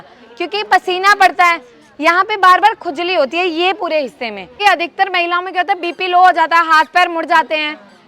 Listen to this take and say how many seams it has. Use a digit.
1